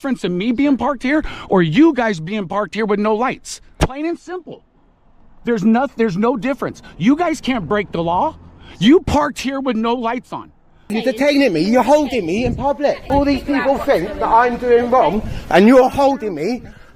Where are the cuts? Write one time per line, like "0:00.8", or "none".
0:03.8
0:10.9
0:13.0